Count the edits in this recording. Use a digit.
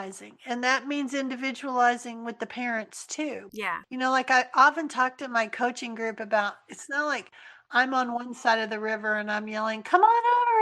1